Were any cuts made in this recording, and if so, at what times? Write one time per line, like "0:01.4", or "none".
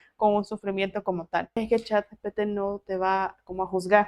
0:01.6